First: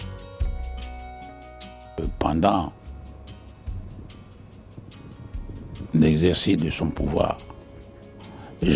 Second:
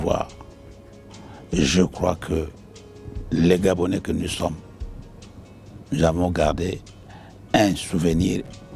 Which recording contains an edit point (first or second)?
first